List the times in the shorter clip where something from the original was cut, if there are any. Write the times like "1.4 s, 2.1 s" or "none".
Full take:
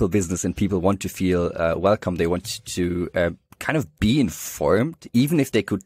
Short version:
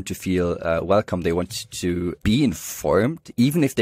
2.1 s